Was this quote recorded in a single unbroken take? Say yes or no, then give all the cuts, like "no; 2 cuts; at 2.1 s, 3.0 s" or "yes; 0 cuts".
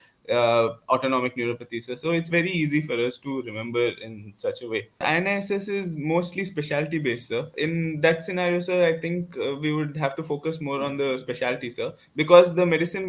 no; 2 cuts; at 5.0 s, 7.5 s